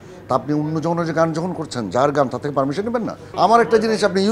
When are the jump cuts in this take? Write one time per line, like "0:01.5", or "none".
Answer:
0:03.2